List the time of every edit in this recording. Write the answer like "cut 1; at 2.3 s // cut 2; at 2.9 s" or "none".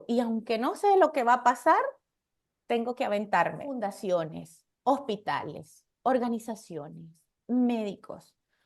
cut 1; at 3.9 s